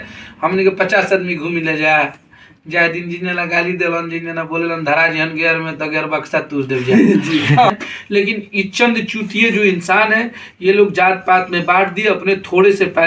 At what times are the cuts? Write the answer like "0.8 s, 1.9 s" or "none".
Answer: 7.9 s